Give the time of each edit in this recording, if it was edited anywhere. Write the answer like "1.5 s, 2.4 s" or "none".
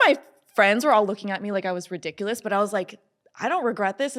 none